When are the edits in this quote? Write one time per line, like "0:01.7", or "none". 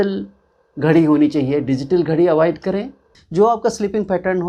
0:03.2